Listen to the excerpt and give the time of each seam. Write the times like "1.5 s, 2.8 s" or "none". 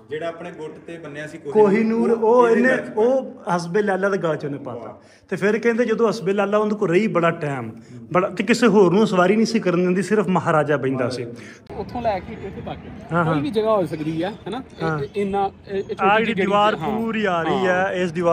11.7 s